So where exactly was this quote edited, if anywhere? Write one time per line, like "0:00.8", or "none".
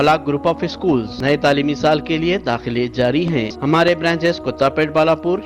0:01.1
0:03.5